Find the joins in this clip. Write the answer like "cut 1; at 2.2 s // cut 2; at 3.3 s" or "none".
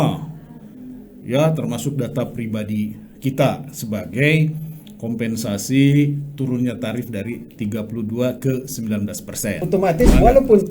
cut 1; at 9.6 s